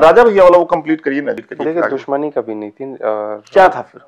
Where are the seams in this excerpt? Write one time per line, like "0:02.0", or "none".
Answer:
0:01.4